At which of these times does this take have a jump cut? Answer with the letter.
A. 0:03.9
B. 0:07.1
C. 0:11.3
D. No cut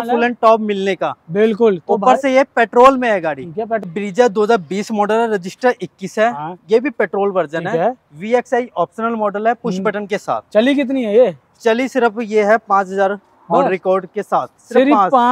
A